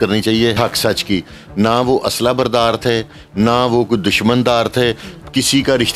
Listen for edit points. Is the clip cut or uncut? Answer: uncut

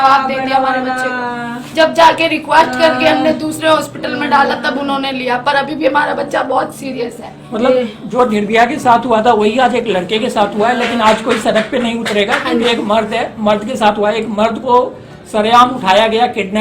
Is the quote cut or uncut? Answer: uncut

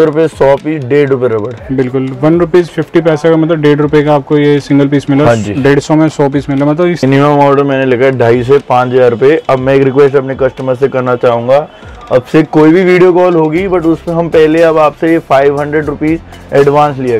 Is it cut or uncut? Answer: cut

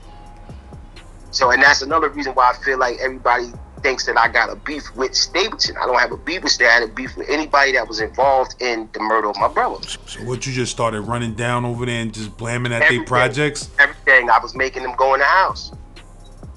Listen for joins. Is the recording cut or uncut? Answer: uncut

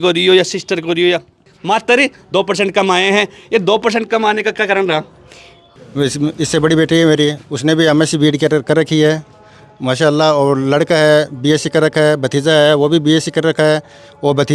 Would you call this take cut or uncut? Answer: cut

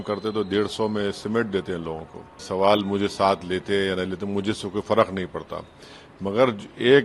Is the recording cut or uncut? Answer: cut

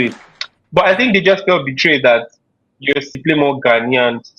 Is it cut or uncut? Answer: uncut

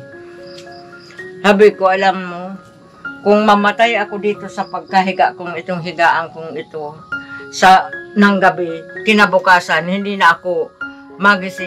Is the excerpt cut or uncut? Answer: uncut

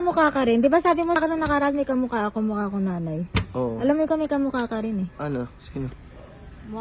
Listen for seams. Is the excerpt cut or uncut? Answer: cut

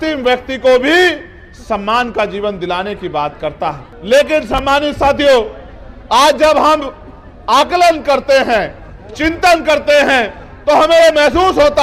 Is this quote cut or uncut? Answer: cut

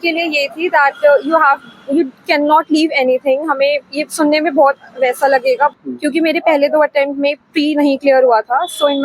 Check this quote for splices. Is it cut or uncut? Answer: cut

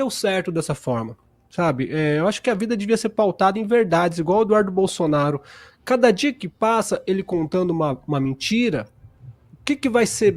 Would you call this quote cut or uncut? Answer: uncut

